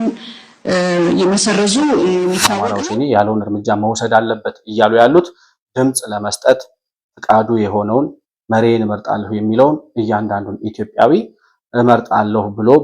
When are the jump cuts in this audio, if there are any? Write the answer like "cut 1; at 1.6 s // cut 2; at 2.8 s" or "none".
cut 1; at 2.7 s

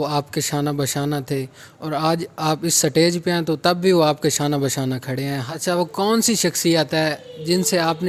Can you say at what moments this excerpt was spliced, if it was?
cut 1; at 5.4 s

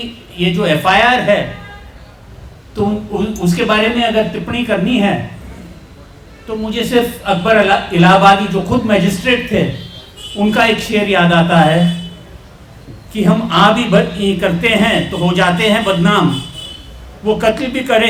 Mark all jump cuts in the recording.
none

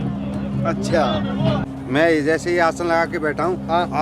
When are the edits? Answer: cut 1; at 1.6 s

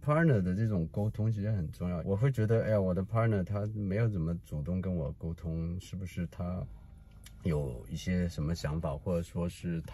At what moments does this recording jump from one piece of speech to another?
cut 1; at 2.0 s

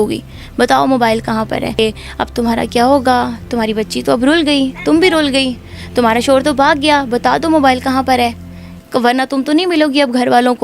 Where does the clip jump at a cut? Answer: cut 1; at 1.8 s

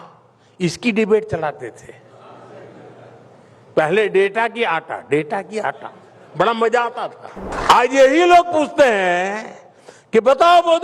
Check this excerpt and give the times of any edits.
cut 1; at 7.4 s

